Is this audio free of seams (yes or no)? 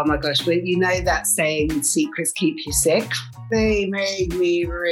no